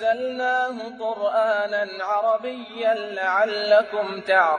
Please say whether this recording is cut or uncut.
uncut